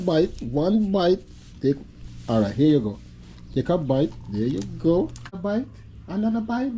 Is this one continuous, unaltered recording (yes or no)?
no